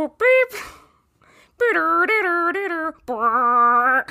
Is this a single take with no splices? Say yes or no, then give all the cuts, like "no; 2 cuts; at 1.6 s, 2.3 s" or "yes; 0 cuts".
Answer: yes; 0 cuts